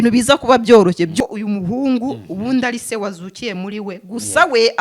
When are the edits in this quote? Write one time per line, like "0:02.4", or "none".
0:01.1